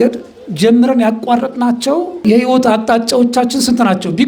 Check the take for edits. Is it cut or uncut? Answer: cut